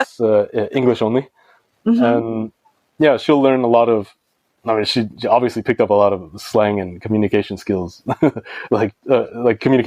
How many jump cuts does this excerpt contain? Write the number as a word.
zero